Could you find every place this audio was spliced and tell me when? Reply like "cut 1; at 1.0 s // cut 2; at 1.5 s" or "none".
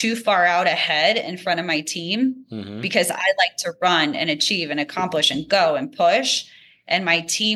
none